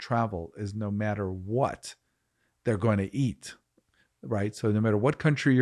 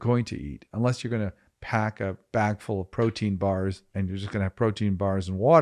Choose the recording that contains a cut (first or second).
second